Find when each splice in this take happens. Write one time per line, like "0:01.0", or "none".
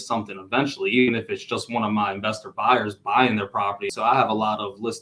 0:03.9